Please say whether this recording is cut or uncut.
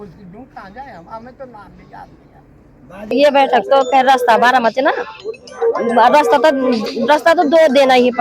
cut